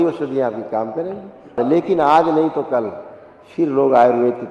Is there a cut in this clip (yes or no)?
yes